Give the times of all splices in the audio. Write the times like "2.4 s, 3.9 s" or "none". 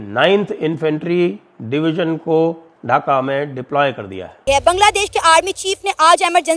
4.4 s